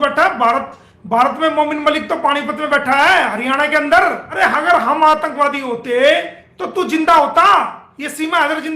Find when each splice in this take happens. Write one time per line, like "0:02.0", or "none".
0:04.3